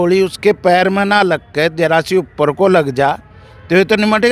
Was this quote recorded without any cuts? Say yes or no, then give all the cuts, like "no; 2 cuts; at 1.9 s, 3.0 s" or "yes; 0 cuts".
yes; 0 cuts